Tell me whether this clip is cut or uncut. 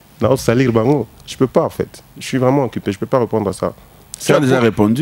uncut